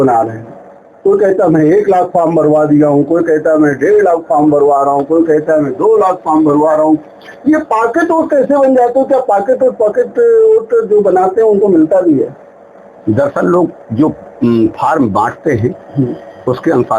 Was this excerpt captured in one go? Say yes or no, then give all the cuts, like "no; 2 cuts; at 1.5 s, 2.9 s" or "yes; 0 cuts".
yes; 0 cuts